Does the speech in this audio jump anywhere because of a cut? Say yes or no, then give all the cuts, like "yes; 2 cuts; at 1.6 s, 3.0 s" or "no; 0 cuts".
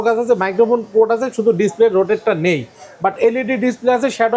no; 0 cuts